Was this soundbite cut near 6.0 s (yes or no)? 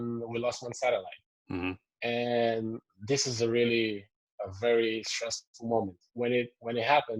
yes